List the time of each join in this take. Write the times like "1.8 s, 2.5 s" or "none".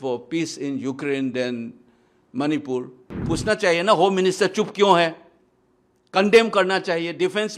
3.2 s

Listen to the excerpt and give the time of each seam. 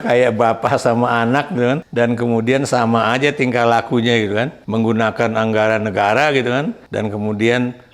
1.9 s, 4.6 s, 6.8 s

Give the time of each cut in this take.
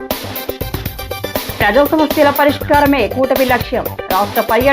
1.3 s

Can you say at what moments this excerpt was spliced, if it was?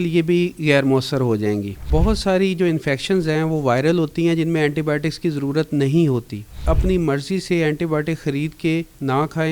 1.9 s, 6.6 s

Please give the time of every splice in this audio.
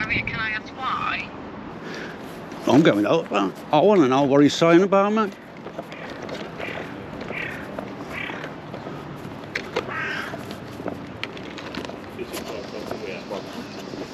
1.7 s

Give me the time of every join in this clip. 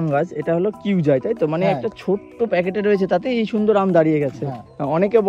none

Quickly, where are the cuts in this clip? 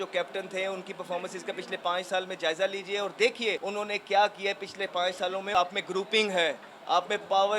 3.6 s, 5.5 s

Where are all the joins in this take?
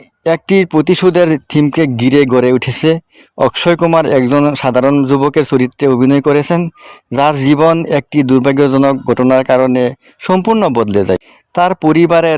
11.4 s

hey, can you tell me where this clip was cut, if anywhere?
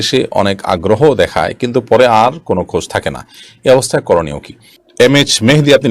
5.0 s

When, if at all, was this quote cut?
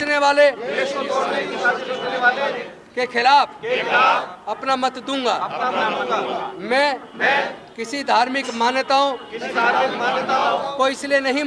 none

